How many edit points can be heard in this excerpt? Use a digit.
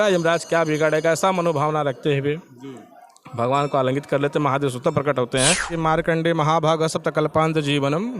1